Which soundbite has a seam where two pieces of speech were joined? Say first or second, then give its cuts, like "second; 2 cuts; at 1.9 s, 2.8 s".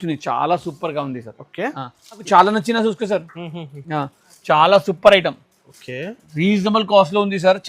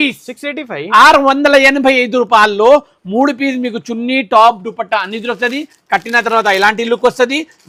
first; 1 cut; at 2.2 s